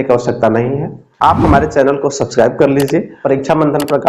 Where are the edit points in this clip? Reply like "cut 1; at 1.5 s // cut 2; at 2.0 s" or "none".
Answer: cut 1; at 3.1 s